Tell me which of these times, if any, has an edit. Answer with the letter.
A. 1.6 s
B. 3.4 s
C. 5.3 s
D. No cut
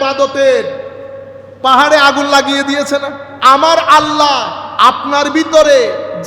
B